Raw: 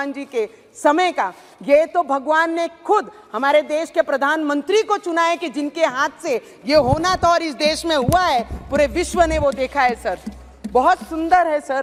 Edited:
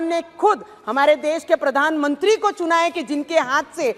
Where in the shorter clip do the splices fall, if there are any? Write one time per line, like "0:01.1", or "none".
none

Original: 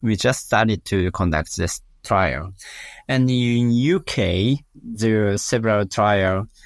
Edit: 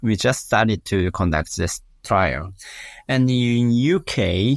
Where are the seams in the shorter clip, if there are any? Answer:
none

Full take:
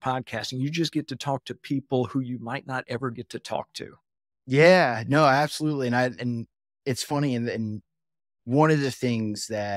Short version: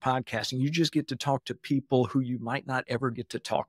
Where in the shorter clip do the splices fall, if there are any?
none

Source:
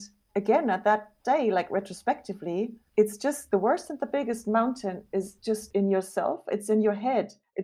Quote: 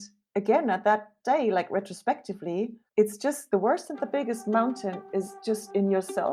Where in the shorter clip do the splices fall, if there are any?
none

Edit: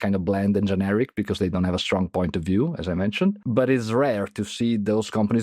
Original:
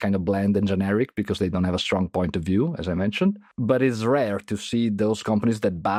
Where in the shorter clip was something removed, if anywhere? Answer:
0:03.4

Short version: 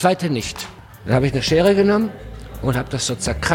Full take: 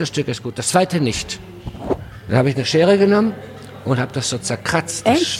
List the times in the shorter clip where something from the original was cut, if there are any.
0:00.9

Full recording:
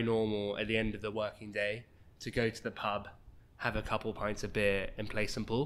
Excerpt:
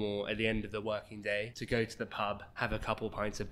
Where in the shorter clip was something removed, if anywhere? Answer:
0:01.6
0:02.5

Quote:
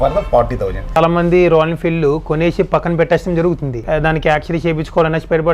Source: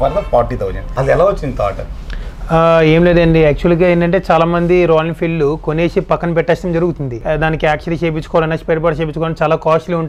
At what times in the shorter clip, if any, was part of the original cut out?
0:01.0

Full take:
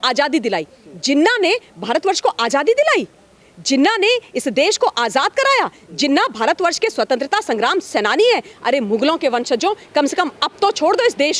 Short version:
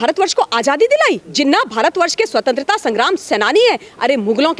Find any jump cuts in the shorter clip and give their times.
0:01.3

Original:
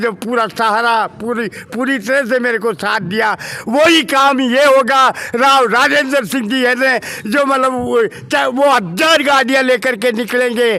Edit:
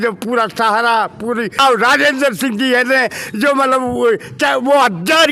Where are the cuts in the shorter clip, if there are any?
0:01.6

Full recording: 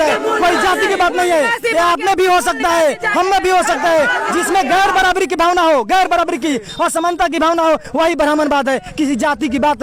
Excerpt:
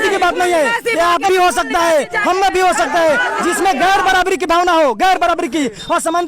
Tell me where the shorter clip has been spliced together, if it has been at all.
0:01.3

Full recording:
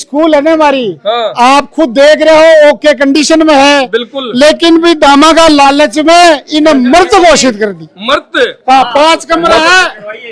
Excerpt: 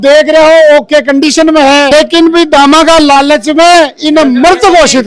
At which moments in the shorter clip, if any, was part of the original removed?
0:01.9

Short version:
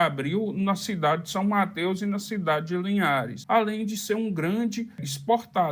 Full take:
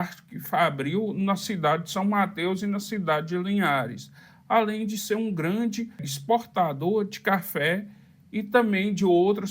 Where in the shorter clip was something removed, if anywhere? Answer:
0:03.3

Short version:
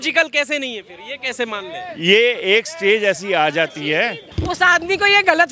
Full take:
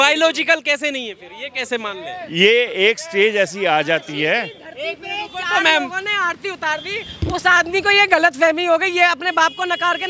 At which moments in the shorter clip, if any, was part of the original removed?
0:04.3

